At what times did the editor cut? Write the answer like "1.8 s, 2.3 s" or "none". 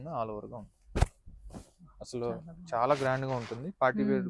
none

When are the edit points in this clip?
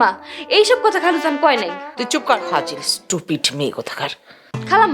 2.4 s

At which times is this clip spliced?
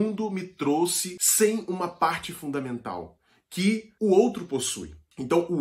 1.1 s

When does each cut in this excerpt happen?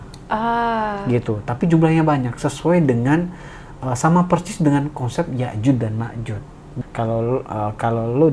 6.6 s

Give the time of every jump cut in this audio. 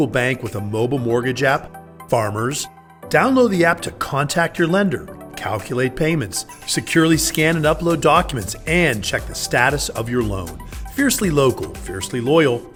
none

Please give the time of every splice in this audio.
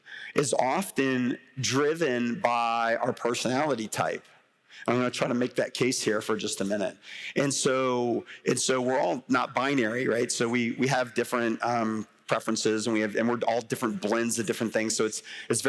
none

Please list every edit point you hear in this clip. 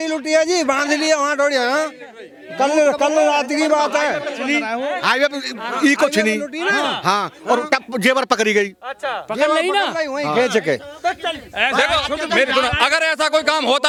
none

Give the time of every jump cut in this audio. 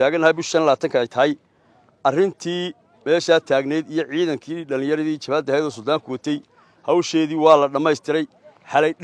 none

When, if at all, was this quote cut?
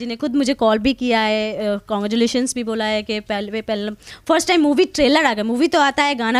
none

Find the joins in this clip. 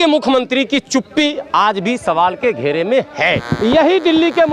3.4 s

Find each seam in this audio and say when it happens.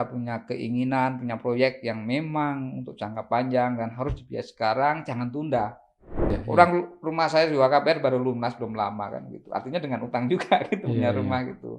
6.3 s

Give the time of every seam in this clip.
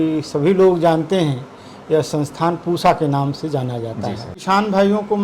4.3 s

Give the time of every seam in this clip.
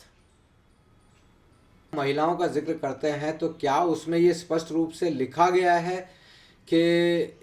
1.9 s

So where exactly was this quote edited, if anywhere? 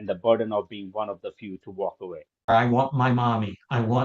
2.5 s

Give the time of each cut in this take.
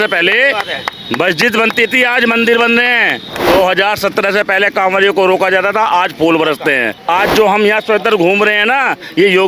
6.9 s

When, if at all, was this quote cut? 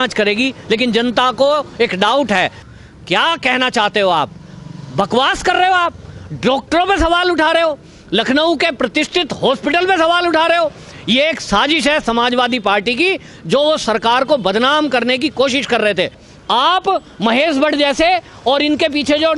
2.6 s, 16.2 s

